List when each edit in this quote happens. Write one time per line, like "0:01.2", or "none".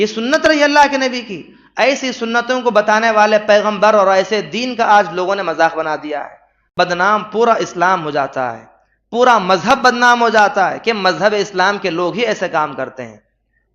0:06.6